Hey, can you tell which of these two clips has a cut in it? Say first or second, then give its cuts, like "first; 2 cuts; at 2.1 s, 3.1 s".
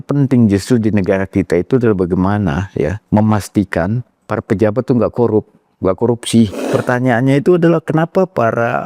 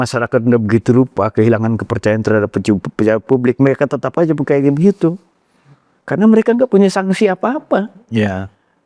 first; 2 cuts; at 3.0 s, 6.6 s